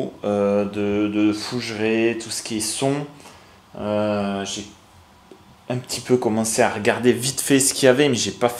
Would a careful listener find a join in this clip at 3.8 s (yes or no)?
no